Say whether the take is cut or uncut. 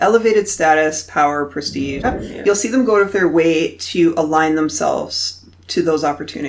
cut